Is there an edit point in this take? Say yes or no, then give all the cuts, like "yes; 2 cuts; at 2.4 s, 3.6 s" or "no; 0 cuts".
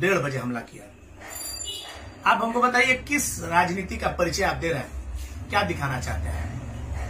no; 0 cuts